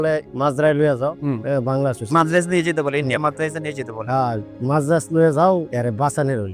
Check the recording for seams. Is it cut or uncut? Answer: uncut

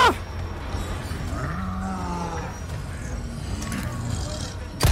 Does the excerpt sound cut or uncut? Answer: uncut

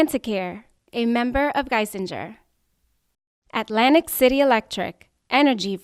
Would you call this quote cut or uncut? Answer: uncut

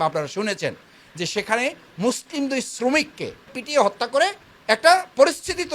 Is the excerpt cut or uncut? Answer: cut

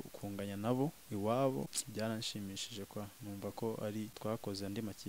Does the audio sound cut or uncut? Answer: cut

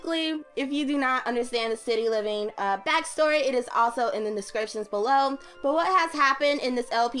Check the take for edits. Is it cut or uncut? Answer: uncut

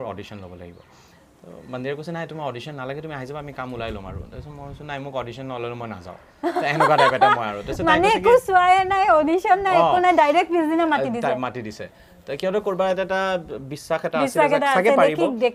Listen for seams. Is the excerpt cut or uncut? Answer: uncut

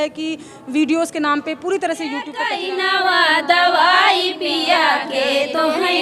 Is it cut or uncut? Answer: cut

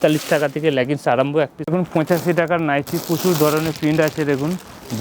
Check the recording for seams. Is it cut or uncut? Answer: cut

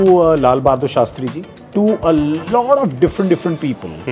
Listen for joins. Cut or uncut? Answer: uncut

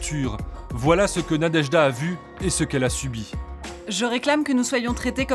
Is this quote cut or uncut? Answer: uncut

